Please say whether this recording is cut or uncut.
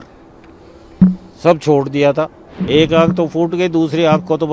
cut